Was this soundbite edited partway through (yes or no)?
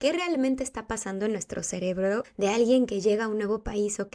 yes